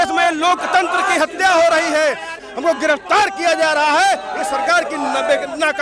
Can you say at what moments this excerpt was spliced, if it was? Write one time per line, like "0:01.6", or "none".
0:02.4